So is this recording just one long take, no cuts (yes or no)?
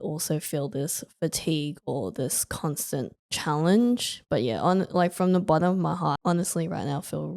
no